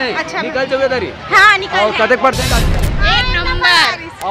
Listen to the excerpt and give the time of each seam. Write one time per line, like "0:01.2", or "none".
0:02.9